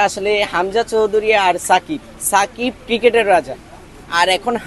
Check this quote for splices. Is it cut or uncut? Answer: uncut